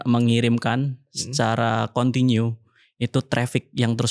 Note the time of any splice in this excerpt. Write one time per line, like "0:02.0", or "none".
none

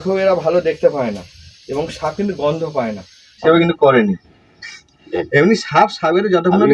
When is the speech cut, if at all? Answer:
0:03.4

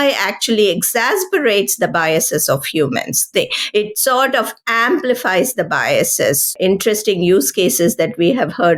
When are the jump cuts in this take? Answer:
0:06.5

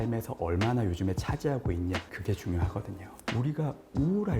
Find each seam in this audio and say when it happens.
0:03.3

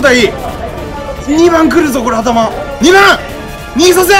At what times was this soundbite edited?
0:01.1
0:02.6

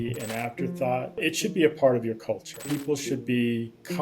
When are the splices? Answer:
0:01.2
0:02.6

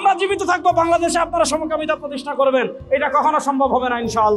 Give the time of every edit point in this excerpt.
none

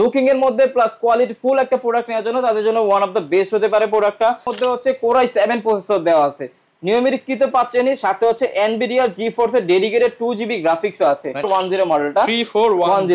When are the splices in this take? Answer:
0:04.5
0:11.5

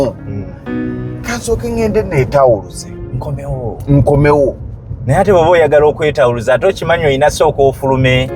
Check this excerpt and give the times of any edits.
none

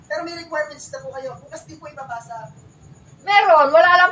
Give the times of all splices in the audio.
none

